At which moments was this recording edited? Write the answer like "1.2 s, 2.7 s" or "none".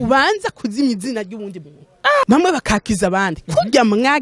2.2 s